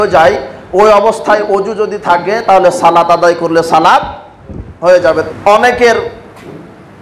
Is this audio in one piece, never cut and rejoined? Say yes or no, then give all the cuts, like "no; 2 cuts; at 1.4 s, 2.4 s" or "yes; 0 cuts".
no; 1 cut; at 5.3 s